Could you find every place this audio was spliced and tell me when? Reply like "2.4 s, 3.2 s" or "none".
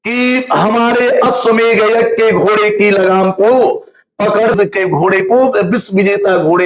4.5 s